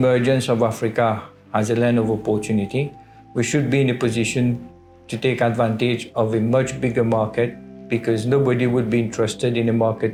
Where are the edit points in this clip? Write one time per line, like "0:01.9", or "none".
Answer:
none